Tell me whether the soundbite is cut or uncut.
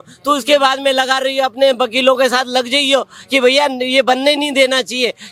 uncut